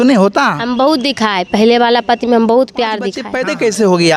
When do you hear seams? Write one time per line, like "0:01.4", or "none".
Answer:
0:03.3